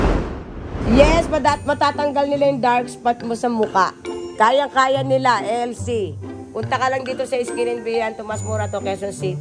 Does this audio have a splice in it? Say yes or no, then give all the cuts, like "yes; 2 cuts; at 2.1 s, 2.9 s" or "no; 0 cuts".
no; 0 cuts